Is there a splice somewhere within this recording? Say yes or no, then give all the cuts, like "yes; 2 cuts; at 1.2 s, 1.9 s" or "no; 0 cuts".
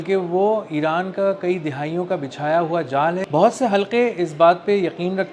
yes; 1 cut; at 3.2 s